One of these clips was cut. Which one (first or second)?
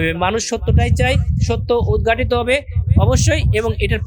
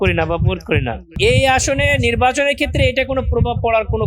second